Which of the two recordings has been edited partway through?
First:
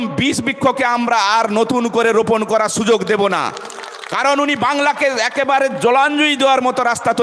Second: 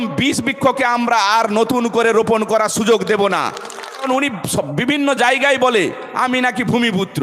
second; 1 cut; at 4.2 s

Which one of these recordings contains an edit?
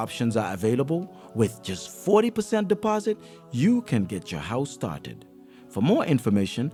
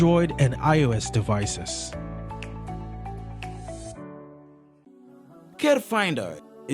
second; 1 cut; at 4.9 s

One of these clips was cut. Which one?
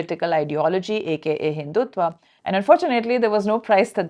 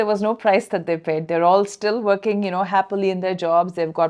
first; 1 cut; at 2.3 s

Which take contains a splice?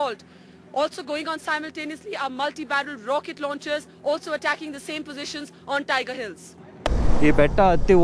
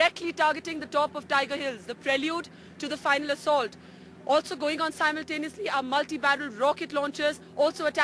first; 1 cut; at 6.8 s

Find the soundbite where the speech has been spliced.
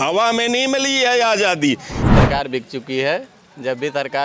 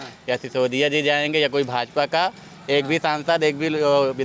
first; 1 cut; at 2.1 s

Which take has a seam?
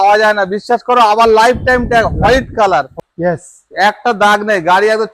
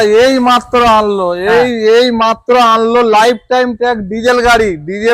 first; 1 cut; at 3.0 s

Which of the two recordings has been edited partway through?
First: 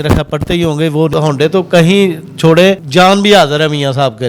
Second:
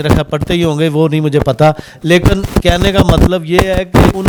first; 2 cuts; at 1.1 s, 2.8 s

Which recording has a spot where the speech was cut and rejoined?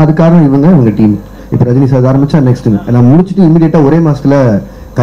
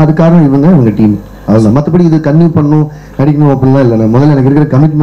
first; 1 cut; at 1.4 s

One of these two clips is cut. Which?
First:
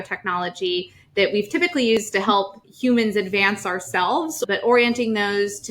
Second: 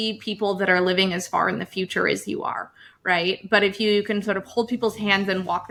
first; 2 cuts; at 2.2 s, 4.5 s

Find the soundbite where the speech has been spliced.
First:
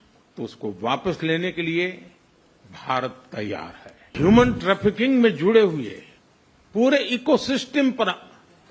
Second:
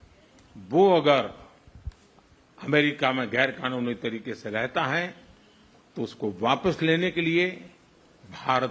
first; 1 cut; at 4.1 s

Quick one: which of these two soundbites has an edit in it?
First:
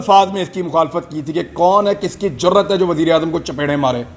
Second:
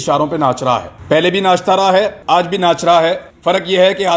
second; 3 cuts; at 0.9 s, 2.2 s, 3.3 s

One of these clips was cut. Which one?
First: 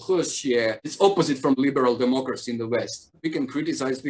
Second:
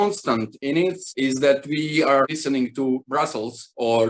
first; 1 cut; at 3.2 s

